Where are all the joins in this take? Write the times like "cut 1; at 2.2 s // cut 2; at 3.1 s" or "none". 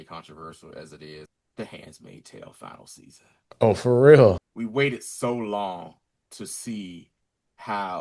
cut 1; at 1.3 s // cut 2; at 4.5 s